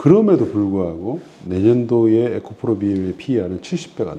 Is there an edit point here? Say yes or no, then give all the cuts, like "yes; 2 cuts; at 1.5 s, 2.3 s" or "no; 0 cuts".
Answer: no; 0 cuts